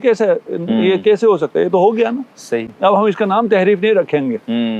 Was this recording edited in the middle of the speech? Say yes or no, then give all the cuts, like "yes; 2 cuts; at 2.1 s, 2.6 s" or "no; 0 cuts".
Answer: no; 0 cuts